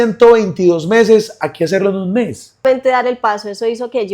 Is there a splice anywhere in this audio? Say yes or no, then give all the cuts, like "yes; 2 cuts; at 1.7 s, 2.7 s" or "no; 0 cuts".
yes; 1 cut; at 2.6 s